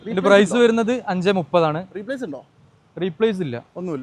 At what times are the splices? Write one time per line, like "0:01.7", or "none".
none